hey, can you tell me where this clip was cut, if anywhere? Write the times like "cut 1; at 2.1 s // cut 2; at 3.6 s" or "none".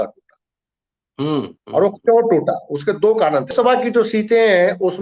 cut 1; at 3.5 s